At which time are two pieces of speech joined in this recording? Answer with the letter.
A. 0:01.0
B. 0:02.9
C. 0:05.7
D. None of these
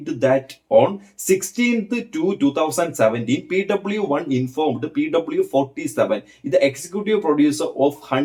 D